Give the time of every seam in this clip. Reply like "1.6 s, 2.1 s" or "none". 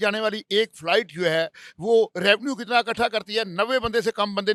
none